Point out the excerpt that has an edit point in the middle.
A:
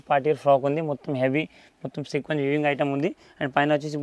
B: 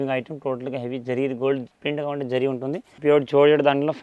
B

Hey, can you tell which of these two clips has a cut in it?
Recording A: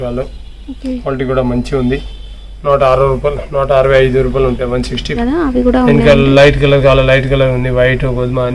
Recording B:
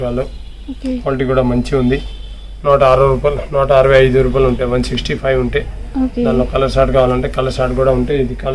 A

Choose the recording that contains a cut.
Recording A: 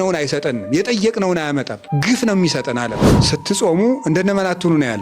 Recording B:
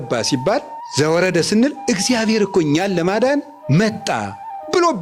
A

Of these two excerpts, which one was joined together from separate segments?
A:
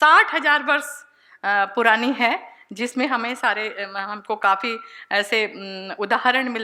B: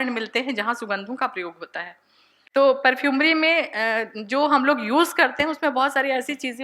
B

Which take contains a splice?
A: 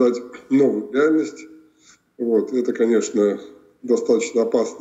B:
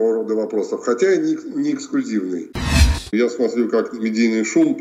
B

